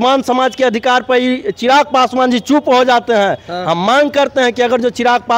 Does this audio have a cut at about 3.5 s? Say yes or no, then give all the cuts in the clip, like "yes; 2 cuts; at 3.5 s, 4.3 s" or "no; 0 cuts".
no; 0 cuts